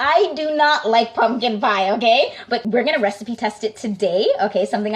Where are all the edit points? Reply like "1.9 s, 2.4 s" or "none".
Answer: 2.6 s